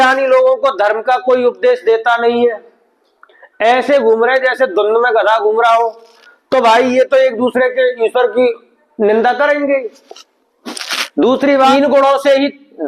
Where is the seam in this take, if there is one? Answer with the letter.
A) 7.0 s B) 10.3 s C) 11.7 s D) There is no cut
C